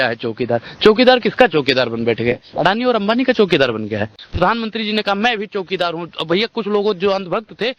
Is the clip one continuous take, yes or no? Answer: yes